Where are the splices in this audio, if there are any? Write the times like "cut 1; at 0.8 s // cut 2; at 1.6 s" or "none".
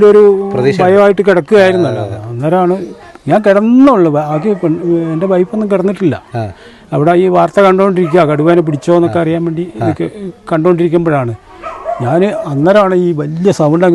none

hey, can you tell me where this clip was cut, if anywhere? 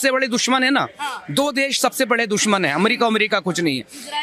none

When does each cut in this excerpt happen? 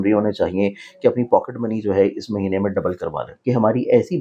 cut 1; at 3.3 s

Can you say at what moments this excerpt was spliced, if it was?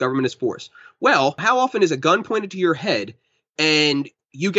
cut 1; at 1.4 s

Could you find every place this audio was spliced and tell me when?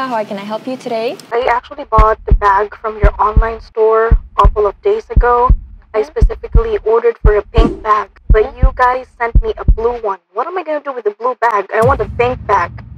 cut 1; at 1.2 s

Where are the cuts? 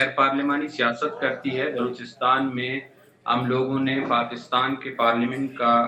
none

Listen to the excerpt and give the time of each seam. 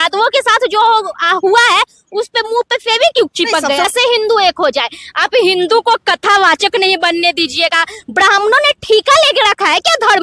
cut 1; at 3.8 s

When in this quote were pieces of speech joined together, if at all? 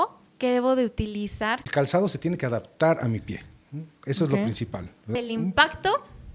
cut 1; at 1.6 s // cut 2; at 5.1 s

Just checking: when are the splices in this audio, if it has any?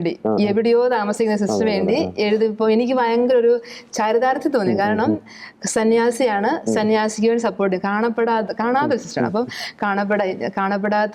none

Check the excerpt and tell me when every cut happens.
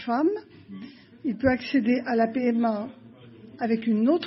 none

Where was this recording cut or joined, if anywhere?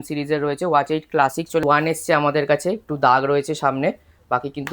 cut 1; at 1.6 s

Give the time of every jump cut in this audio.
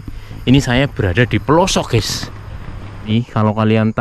cut 1; at 3.1 s

